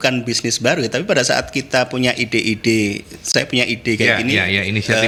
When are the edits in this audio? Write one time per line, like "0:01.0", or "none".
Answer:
none